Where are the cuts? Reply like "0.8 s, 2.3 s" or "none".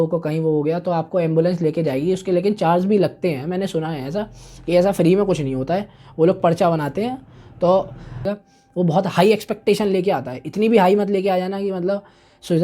8.4 s